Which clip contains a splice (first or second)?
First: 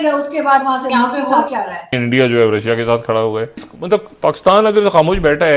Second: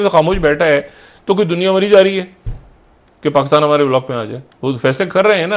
first